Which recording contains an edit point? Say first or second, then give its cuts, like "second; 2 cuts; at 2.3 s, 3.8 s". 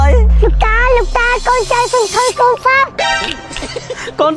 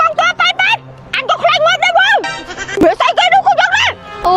second; 1 cut; at 2.8 s